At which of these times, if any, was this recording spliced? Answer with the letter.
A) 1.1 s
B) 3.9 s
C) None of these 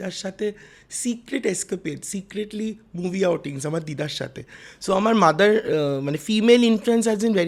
C